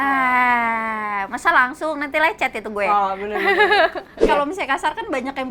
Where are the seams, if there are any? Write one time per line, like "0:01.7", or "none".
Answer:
0:04.1